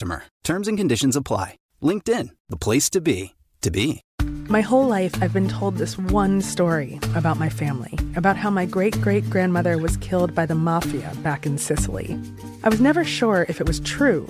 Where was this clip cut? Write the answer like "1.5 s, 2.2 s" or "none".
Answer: 4.1 s